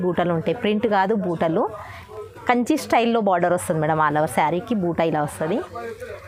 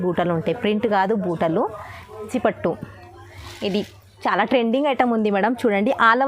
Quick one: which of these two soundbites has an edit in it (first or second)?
second